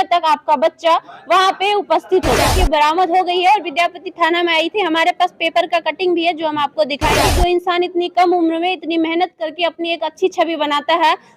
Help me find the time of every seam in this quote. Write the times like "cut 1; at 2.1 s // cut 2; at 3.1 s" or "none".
cut 1; at 2.4 s // cut 2; at 7.2 s